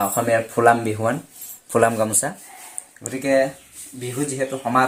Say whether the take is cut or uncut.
uncut